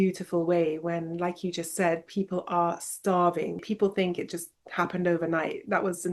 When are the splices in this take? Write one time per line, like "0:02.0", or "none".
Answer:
0:03.6